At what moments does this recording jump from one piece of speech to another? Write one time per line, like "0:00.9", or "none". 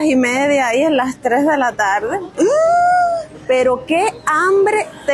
none